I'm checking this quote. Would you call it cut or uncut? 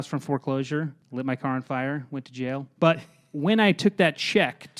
cut